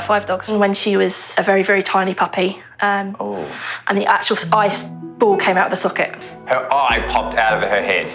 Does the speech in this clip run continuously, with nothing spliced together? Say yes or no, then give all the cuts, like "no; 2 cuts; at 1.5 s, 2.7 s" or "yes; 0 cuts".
no; 1 cut; at 6.3 s